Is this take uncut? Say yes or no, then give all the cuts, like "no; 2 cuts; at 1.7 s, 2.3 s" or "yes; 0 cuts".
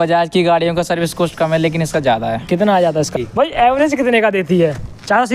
no; 1 cut; at 3.1 s